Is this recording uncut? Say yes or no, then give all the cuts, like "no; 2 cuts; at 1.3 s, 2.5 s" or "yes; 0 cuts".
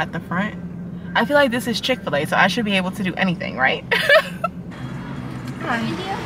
yes; 0 cuts